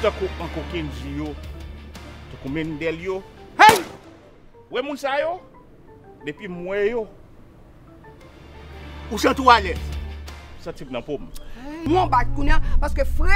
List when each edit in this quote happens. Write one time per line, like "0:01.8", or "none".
0:11.9

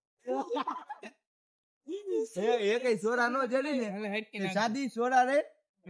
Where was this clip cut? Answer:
none

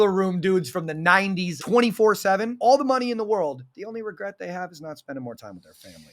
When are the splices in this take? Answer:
0:01.5
0:02.5
0:03.9

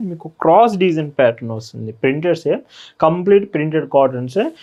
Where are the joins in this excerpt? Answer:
none

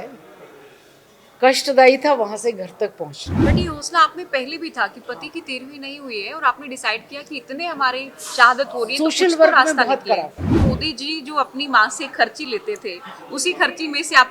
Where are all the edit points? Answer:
0:03.3
0:10.6

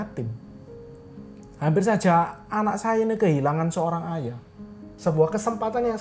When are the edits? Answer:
0:04.8

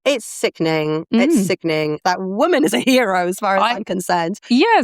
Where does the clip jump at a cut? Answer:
0:02.0

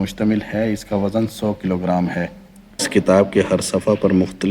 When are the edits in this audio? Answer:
0:02.9

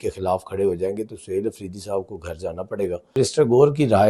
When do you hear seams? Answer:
0:03.1

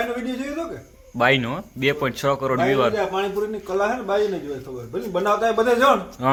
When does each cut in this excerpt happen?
none

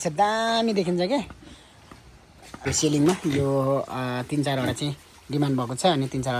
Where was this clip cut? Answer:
0:02.7

